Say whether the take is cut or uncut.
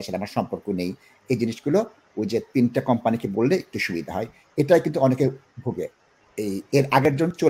uncut